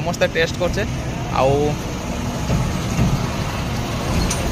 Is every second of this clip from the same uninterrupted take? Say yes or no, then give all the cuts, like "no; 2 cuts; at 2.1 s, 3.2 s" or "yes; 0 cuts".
yes; 0 cuts